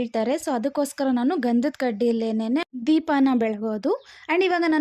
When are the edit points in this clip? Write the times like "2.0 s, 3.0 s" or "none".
none